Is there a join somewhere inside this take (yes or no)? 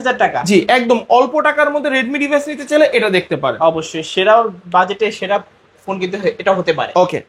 no